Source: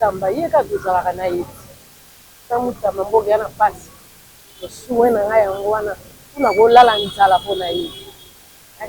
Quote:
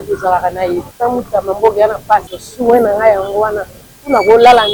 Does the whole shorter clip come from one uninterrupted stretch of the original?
no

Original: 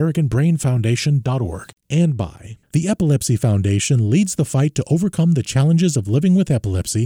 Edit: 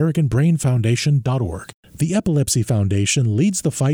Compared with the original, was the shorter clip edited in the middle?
yes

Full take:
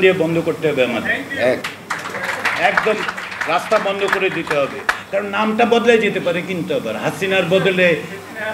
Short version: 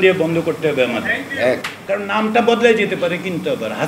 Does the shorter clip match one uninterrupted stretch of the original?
no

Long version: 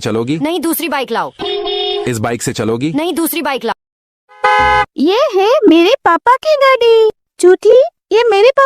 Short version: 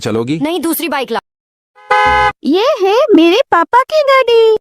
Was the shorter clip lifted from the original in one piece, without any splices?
no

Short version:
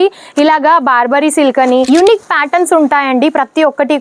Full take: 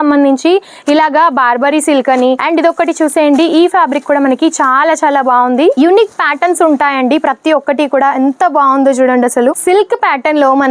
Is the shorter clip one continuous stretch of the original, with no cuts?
no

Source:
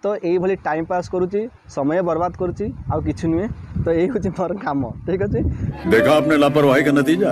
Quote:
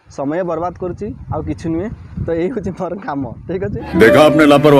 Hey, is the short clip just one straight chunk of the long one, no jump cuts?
no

